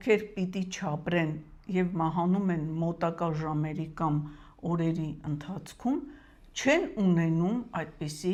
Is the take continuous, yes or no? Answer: yes